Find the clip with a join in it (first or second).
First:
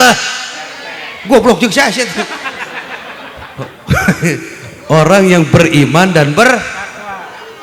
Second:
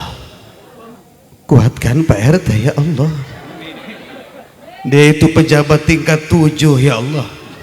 second